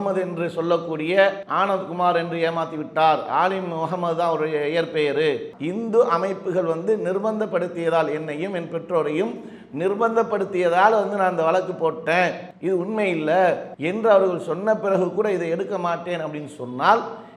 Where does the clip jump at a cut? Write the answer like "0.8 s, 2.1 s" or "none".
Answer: 1.4 s, 5.4 s, 12.5 s, 13.7 s